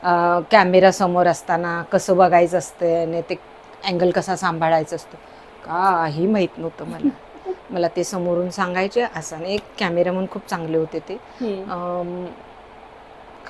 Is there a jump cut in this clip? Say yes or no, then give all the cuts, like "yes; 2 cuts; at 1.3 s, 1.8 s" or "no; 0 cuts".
no; 0 cuts